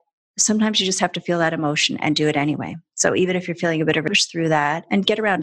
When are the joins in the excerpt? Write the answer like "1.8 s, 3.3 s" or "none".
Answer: 4.0 s

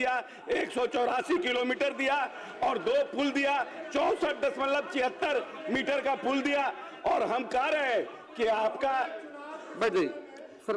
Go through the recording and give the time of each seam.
none

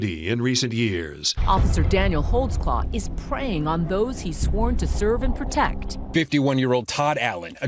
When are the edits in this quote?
1.3 s, 6.1 s

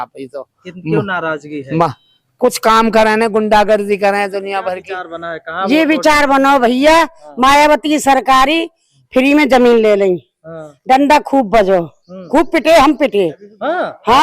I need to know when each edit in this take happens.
4.7 s

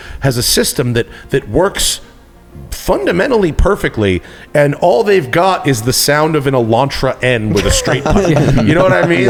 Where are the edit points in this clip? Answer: none

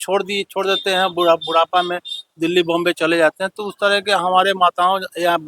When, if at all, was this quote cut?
none

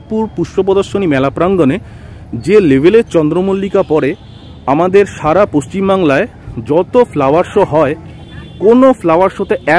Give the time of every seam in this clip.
none

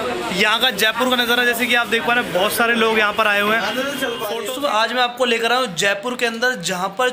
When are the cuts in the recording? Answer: 4.3 s

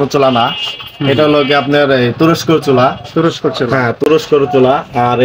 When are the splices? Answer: none

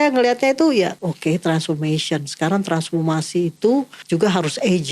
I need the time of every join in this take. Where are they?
0.9 s, 4.0 s

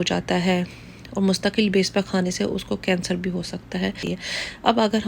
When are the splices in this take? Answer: 4.0 s

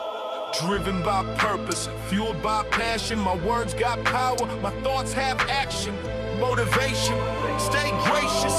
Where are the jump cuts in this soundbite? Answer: none

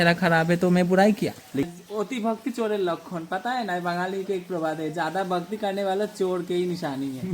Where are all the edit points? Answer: 1.6 s

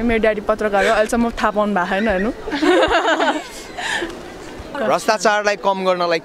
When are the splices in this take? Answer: 4.7 s

